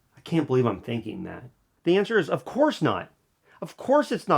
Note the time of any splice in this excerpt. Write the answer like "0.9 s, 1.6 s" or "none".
1.7 s